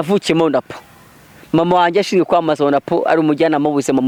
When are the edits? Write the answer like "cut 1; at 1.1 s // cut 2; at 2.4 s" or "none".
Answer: none